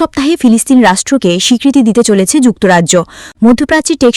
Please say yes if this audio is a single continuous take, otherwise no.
yes